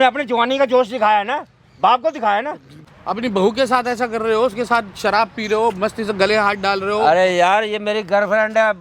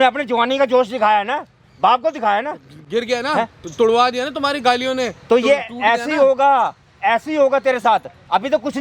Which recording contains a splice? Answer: first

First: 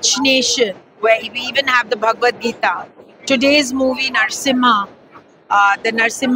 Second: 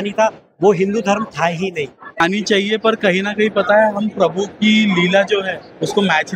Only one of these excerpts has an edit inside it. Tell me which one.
second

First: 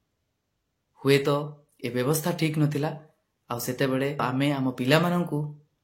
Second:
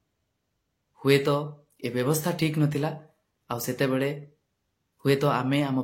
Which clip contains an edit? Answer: first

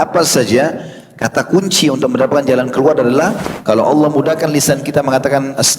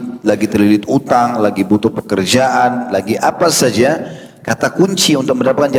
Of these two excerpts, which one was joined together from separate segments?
first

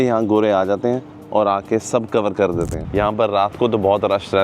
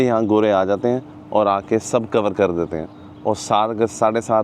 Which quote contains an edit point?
first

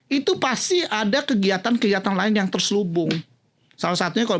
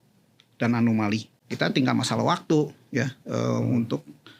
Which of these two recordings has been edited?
second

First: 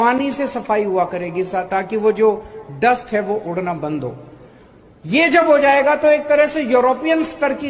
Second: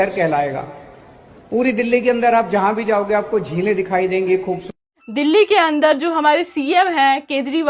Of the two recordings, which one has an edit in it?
second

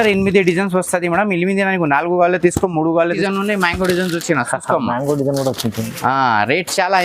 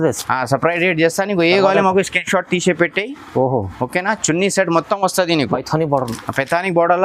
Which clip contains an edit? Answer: first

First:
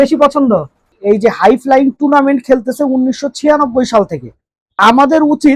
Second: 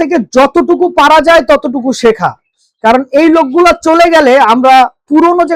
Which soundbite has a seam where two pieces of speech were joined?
first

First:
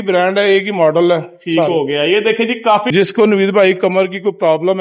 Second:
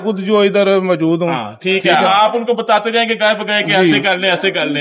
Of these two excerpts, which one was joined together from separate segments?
first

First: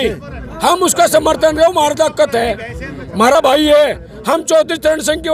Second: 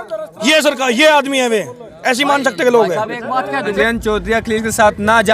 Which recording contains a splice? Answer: second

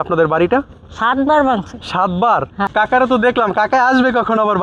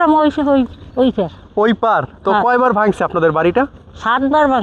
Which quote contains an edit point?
first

